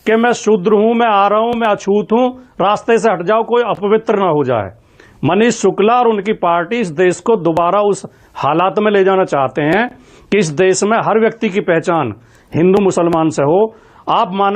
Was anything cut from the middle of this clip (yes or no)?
no